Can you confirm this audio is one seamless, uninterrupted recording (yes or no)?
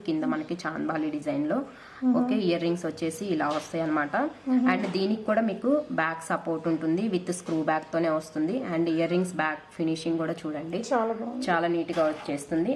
yes